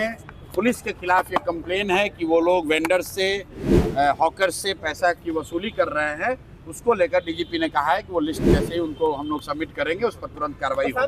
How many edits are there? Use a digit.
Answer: 0